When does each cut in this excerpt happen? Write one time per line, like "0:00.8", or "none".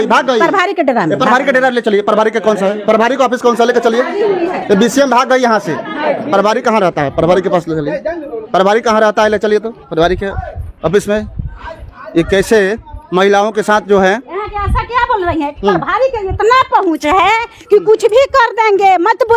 none